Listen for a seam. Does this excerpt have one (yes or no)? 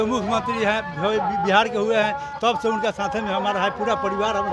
no